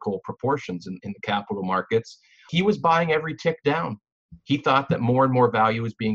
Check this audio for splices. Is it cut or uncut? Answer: cut